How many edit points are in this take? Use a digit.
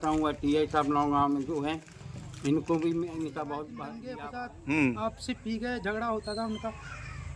1